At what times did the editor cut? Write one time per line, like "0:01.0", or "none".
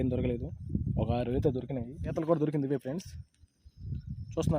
0:02.0